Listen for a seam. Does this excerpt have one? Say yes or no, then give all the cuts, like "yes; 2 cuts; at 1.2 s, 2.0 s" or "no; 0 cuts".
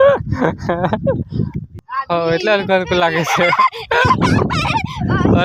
yes; 1 cut; at 1.7 s